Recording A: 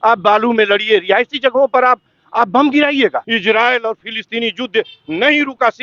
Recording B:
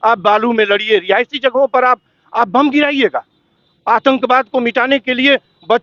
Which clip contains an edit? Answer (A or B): A